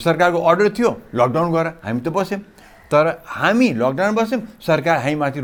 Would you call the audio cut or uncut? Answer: uncut